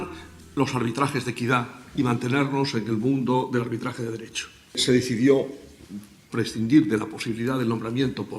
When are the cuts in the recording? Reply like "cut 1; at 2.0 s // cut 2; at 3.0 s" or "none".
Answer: cut 1; at 5.1 s